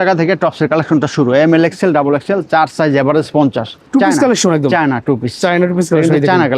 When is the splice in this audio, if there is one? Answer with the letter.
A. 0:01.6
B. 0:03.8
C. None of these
B